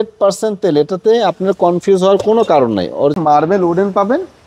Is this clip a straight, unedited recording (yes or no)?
no